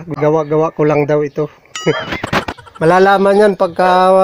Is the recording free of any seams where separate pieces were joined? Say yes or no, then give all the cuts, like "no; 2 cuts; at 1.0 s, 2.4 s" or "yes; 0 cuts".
no; 2 cuts; at 1.7 s, 2.4 s